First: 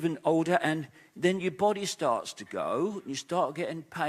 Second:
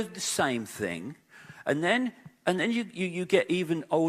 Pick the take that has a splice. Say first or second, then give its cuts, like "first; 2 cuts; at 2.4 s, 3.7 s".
second; 1 cut; at 2.5 s